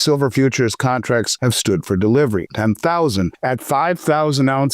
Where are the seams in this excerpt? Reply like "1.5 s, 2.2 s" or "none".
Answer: 1.3 s, 2.5 s, 3.4 s